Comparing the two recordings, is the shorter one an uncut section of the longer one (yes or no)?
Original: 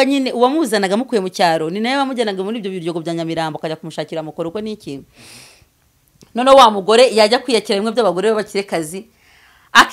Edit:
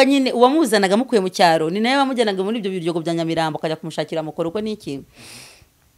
yes